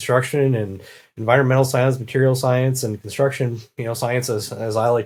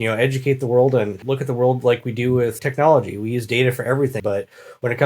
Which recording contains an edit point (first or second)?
second